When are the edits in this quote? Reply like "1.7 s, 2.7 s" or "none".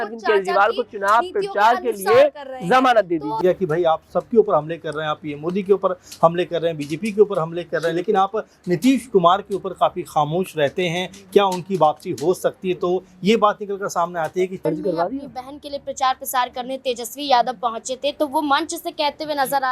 3.4 s, 14.6 s